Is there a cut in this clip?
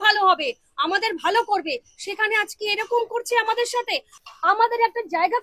yes; 1 cut; at 4.2 s

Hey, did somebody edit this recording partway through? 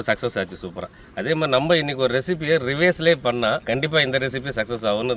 yes; 1 cut; at 3.6 s

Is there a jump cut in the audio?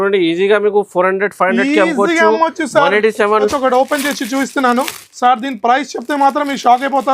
yes; 1 cut; at 3.5 s

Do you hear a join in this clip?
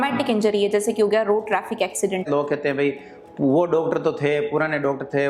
yes; 1 cut; at 2.3 s

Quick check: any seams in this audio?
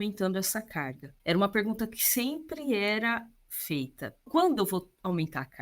yes; 1 cut; at 1.0 s

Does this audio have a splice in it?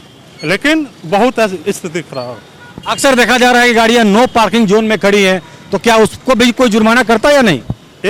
no; 0 cuts

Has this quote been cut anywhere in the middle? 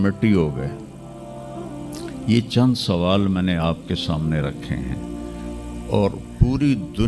no; 0 cuts

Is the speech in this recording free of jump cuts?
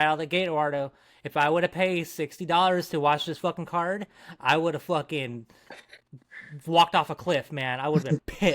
yes; 0 cuts

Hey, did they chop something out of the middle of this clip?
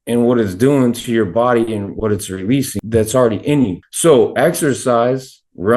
yes; 2 cuts; at 2.8 s, 3.8 s

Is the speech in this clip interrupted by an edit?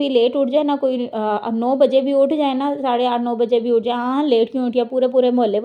no; 0 cuts

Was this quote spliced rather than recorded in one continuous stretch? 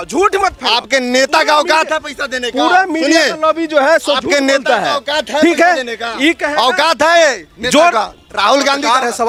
no; 0 cuts

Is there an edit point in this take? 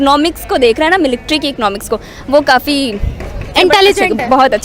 yes; 1 cut; at 3.5 s

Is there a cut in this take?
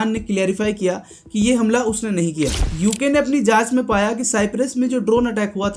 no; 0 cuts

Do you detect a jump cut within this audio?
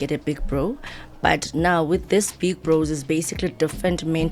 no; 0 cuts

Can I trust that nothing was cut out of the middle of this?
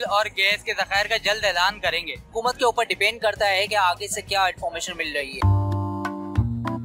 no; 2 cuts; at 2.3 s, 5.5 s

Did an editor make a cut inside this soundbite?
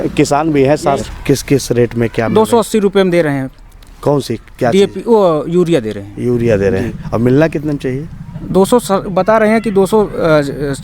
yes; 1 cut; at 1.0 s

